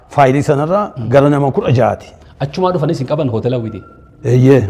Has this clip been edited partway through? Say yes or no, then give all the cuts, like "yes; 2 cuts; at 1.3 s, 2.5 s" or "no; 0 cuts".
no; 0 cuts